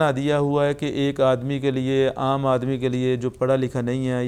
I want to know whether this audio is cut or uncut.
uncut